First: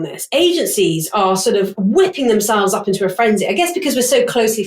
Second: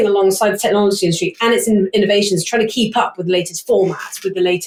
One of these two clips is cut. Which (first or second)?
first